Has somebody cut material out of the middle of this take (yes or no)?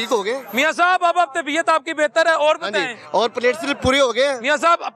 no